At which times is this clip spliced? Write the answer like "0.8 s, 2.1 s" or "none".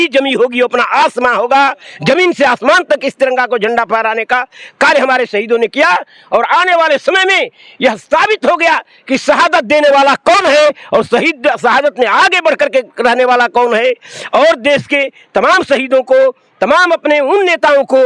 none

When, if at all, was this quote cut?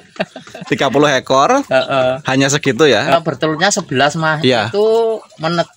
3.2 s

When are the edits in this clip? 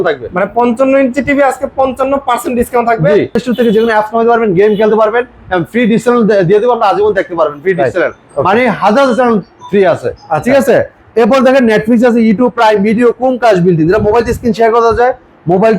3.4 s

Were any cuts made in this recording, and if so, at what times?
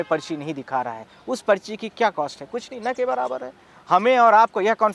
none

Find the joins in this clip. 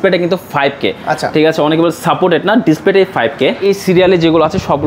3.6 s

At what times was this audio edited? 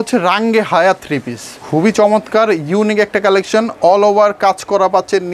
1.6 s

